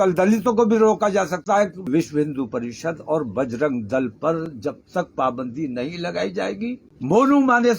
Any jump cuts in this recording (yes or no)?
yes